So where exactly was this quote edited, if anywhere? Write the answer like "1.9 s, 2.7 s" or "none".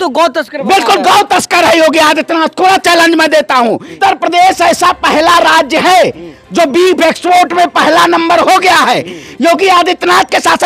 3.9 s, 9.2 s